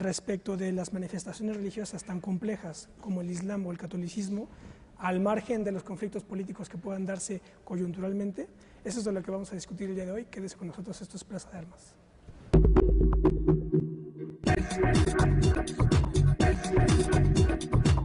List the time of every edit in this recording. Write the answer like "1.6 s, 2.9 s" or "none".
none